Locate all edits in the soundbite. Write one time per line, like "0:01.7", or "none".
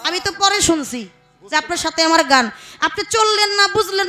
none